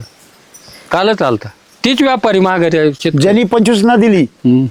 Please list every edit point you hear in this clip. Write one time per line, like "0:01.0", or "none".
none